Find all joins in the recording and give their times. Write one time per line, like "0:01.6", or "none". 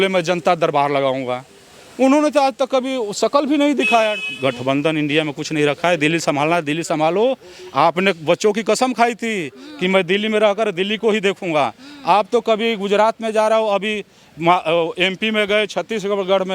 0:04.3